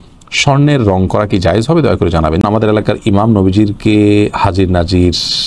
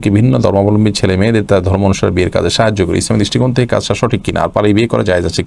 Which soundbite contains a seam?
first; 1 cut; at 2.4 s

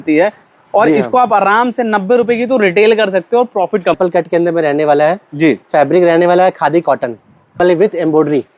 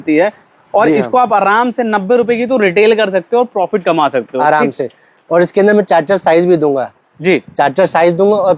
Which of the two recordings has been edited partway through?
first; 2 cuts; at 4.0 s, 7.6 s

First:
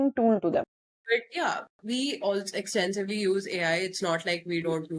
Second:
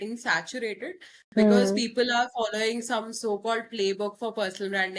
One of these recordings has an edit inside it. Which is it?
first; 1 cut; at 0.9 s

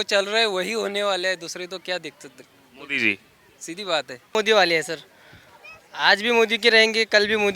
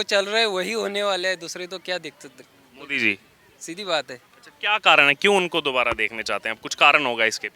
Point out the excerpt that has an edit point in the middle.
first; 1 cut; at 4.3 s

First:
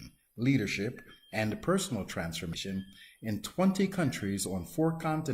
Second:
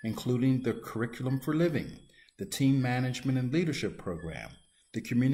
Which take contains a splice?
first; 1 cut; at 2.6 s

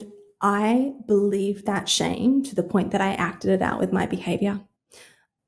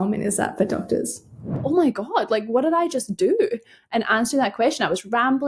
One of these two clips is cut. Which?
second; 1 cut; at 1.6 s

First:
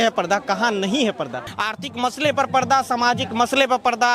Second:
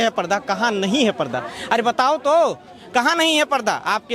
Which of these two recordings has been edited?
first; 1 cut; at 1.5 s

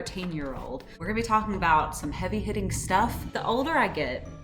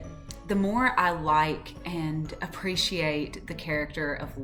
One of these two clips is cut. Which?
first; 2 cuts; at 1.0 s, 3.3 s

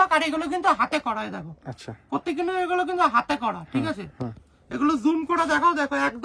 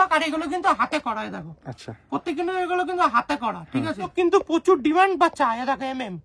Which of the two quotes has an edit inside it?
second; 1 cut; at 4.1 s

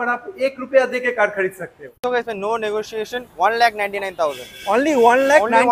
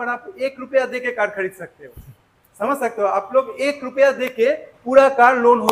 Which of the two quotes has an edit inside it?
first; 1 cut; at 2.0 s

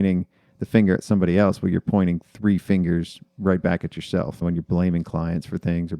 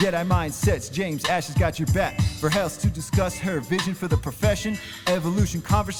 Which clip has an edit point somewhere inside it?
first; 1 cut; at 4.3 s

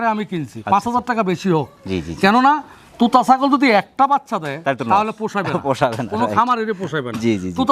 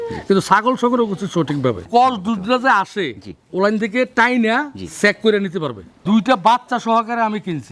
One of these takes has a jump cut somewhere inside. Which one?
second; 2 cuts; at 1.8 s, 5.9 s

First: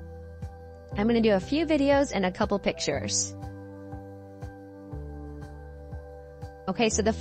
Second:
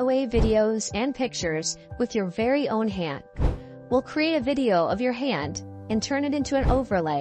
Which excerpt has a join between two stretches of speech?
first; 3 cuts; at 1.0 s, 3.2 s, 6.5 s

